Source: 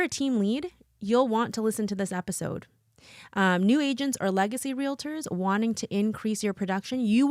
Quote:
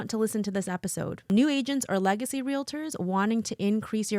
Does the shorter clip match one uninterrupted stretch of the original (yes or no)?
no